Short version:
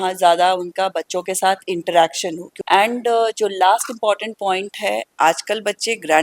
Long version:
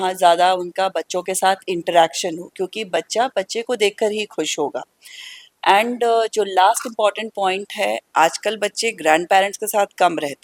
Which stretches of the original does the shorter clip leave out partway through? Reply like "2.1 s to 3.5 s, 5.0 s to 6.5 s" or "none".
2.5 s to 5.4 s